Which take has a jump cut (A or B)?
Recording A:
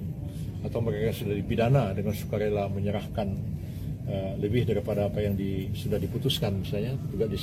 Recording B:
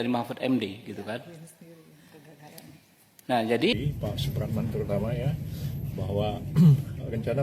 B